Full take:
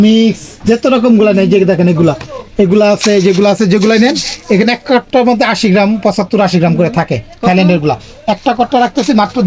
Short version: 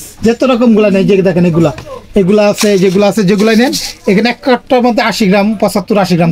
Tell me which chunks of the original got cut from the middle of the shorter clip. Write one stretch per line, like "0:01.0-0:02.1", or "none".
none